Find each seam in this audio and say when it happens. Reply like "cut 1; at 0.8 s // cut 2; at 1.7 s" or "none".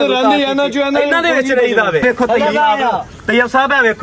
cut 1; at 2.0 s